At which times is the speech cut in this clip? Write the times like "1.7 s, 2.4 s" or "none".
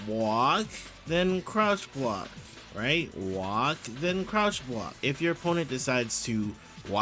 4.9 s